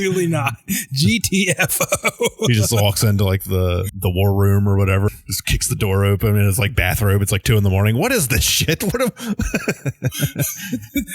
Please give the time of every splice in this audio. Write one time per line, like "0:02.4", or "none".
0:03.9
0:05.1